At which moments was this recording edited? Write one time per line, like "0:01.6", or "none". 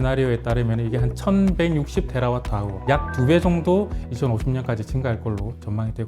0:02.8